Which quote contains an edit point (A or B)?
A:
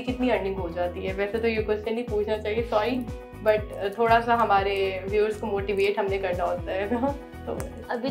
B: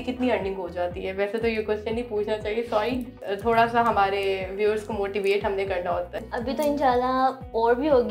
B